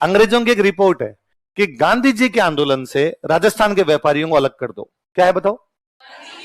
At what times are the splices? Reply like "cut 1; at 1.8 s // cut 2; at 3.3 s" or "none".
none